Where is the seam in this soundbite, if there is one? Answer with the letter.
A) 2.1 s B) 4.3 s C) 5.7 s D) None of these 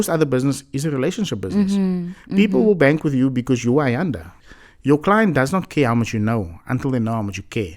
B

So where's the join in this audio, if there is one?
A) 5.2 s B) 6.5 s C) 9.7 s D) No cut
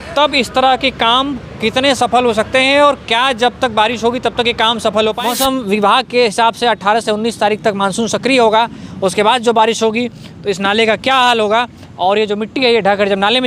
A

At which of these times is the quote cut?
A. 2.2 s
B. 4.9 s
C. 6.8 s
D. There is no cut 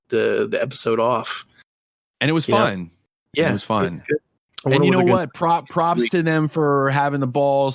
D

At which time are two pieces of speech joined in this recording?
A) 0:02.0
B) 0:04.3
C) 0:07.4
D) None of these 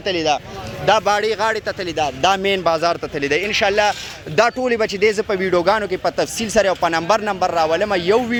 D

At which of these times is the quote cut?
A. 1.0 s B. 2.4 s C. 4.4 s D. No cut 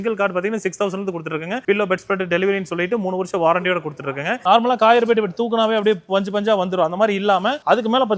C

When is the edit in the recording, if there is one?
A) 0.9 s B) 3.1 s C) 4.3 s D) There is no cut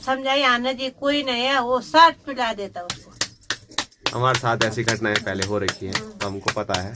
D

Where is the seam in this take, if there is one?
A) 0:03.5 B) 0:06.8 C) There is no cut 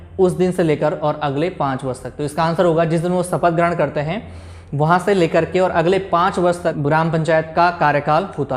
B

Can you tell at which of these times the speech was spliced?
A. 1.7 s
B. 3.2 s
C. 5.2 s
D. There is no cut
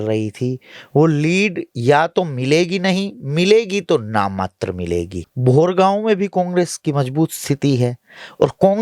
C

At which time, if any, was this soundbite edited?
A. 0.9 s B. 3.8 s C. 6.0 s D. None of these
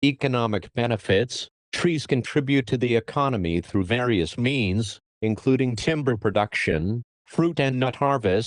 A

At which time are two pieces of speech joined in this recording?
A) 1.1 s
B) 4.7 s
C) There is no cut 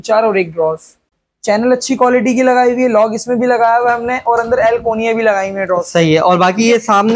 A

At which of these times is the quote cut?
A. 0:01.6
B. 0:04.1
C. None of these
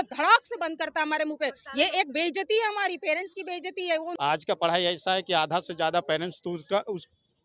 B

